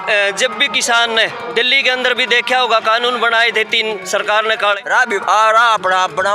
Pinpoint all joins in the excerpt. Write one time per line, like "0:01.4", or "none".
0:04.8